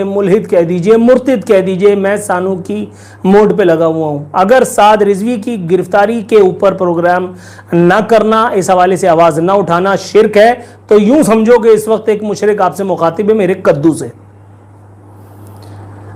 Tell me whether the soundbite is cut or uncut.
uncut